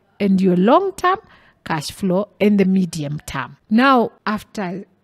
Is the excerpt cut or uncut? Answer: cut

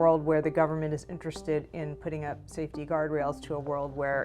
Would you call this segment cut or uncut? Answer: uncut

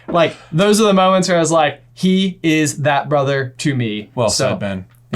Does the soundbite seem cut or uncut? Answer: cut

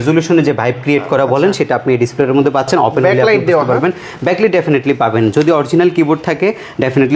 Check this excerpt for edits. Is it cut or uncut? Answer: uncut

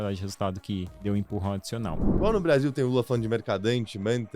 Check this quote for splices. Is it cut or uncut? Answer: cut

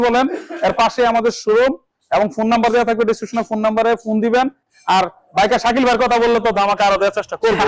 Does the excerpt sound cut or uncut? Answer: uncut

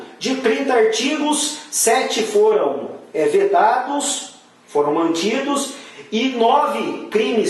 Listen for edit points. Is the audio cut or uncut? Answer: uncut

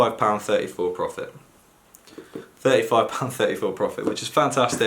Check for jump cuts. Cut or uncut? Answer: uncut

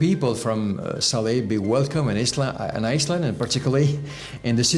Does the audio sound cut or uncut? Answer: uncut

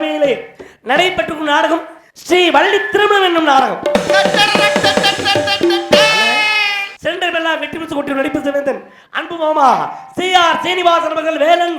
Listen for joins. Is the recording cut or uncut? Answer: cut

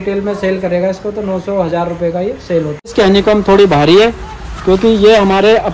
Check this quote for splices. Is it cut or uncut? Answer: cut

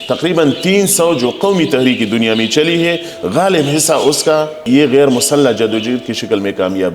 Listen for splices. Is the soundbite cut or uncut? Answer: cut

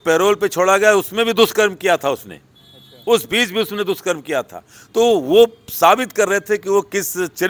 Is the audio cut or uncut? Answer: uncut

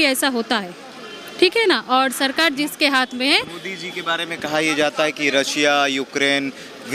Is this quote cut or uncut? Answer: uncut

